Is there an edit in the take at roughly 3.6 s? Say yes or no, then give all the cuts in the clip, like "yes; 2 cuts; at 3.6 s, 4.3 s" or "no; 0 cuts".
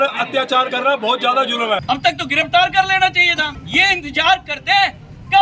yes; 2 cuts; at 1.8 s, 3.6 s